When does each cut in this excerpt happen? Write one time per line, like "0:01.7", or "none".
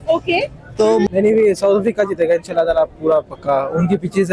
0:01.1